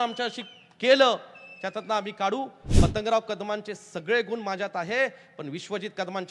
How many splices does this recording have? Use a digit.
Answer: 1